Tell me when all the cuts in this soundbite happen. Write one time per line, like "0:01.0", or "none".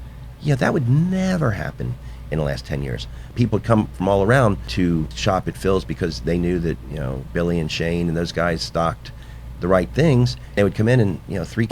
0:03.3
0:04.9
0:10.6